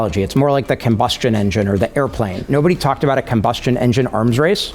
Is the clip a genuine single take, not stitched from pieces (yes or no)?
no